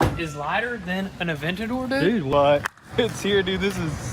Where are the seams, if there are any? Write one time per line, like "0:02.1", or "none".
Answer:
0:02.3

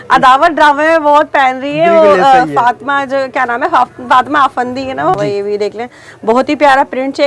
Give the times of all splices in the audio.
0:05.2

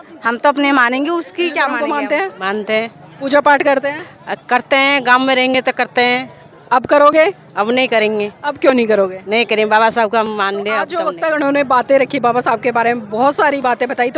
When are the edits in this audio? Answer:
0:01.8
0:11.0

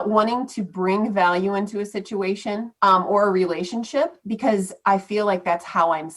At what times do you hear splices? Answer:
0:02.7

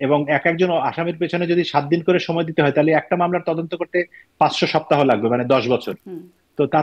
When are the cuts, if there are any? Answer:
none

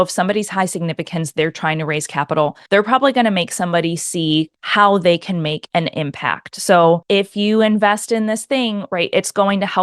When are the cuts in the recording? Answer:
0:02.6
0:04.6
0:05.6
0:07.0

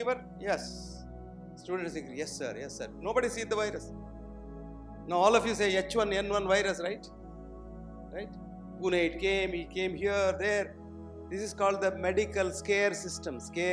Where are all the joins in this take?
none

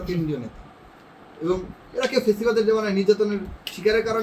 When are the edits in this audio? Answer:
none

